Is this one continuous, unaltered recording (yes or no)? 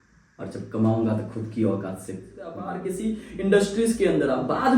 no